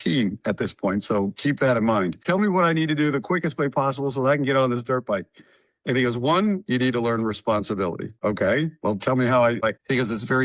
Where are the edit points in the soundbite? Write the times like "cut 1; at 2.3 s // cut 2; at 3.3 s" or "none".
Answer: cut 1; at 2.2 s // cut 2; at 8.1 s // cut 3; at 9.6 s